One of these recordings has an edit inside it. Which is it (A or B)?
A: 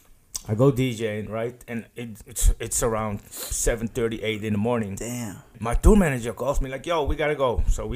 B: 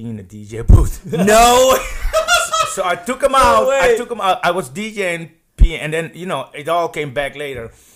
A